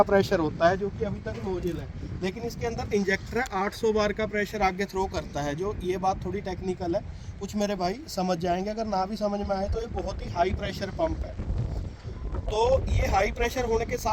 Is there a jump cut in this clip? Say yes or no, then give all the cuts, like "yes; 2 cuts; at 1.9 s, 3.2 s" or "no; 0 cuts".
no; 0 cuts